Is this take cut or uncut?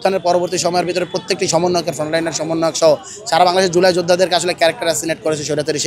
uncut